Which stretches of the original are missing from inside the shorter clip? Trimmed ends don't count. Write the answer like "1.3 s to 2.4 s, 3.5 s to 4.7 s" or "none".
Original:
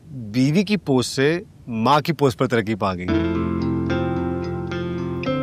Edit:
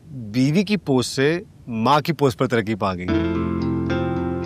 none